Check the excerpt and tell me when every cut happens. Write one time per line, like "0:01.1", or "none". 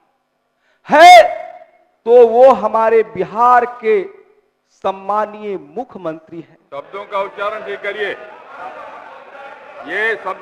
none